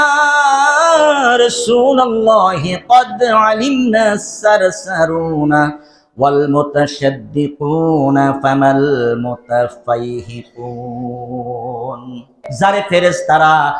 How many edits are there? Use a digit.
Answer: 1